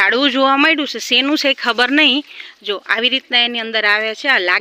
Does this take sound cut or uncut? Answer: uncut